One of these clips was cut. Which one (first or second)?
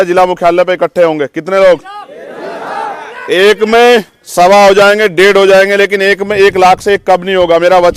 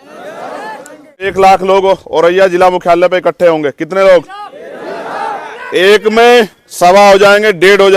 second